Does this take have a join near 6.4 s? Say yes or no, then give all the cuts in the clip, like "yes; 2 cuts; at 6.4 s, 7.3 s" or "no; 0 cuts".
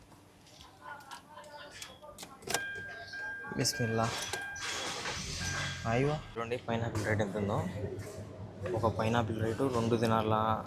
yes; 1 cut; at 6.4 s